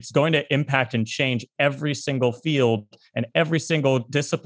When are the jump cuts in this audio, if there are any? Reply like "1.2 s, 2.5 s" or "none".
none